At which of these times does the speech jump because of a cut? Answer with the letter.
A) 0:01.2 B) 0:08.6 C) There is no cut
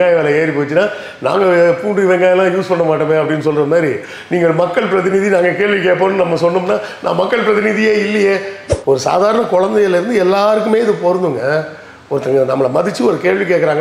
B